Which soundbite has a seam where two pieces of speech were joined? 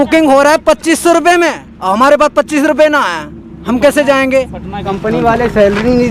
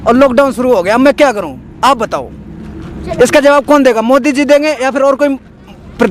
first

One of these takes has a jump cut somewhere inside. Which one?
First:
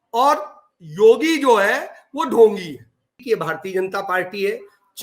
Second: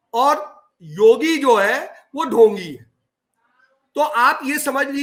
first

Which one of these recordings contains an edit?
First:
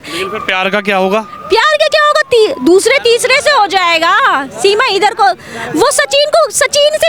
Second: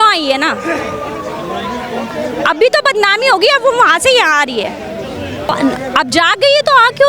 second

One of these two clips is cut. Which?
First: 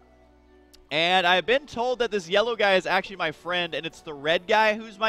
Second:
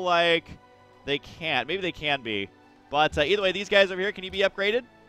first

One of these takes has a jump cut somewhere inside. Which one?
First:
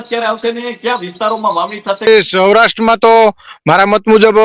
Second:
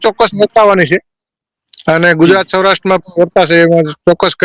first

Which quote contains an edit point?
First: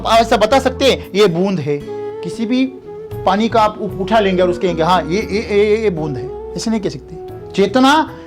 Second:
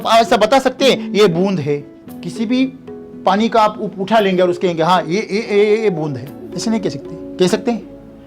first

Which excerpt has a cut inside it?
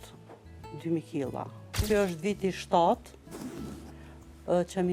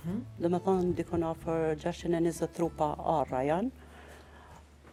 first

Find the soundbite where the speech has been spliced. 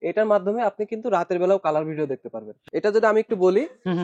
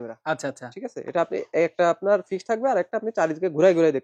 first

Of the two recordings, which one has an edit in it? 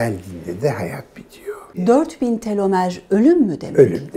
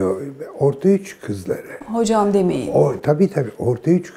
first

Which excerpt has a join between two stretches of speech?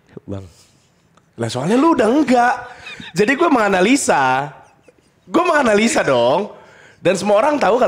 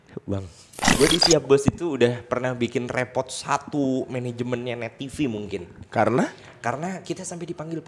second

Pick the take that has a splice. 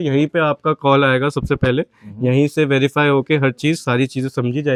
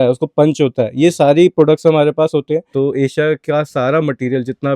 second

